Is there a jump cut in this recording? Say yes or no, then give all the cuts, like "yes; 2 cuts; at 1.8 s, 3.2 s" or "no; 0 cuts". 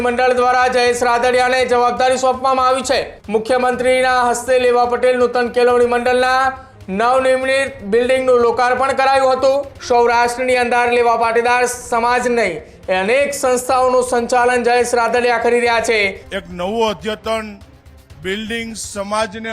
yes; 3 cuts; at 3.1 s, 9.7 s, 16.2 s